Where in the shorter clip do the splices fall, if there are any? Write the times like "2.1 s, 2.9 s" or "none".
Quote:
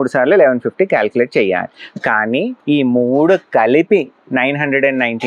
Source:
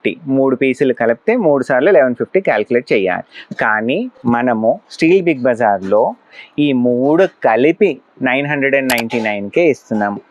2.6 s